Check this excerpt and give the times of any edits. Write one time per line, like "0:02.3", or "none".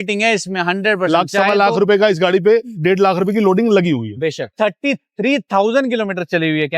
0:04.5